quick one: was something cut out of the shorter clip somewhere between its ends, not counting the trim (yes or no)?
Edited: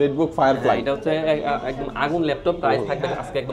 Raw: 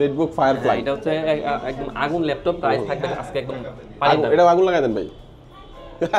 no